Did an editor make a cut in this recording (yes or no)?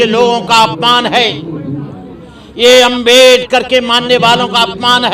no